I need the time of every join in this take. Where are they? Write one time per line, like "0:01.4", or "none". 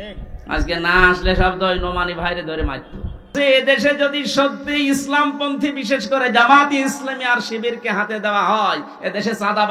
0:03.3

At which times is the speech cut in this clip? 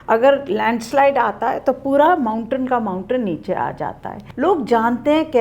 0:04.2

